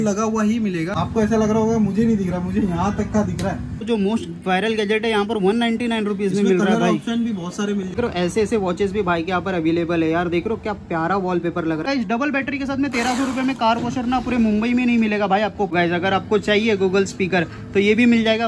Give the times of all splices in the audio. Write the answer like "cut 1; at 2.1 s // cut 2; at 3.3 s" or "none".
cut 1; at 0.9 s // cut 2; at 3.8 s // cut 3; at 7.9 s // cut 4; at 11.9 s // cut 5; at 15.7 s